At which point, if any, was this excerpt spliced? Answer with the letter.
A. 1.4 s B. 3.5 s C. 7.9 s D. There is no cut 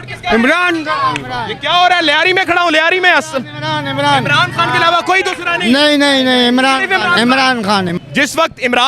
C